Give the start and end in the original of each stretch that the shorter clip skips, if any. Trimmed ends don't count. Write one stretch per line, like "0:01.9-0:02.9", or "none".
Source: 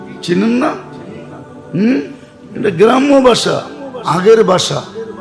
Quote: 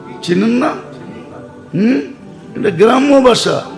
none